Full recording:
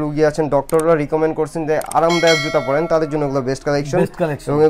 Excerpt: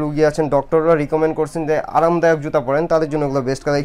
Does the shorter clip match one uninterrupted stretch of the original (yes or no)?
yes